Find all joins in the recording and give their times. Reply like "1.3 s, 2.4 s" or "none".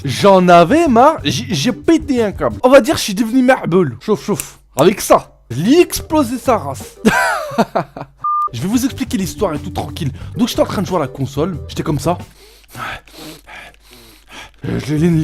13.4 s